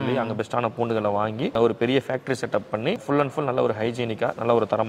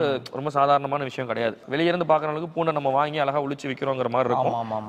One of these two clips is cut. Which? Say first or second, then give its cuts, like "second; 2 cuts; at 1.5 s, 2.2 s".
first; 2 cuts; at 1.6 s, 3.0 s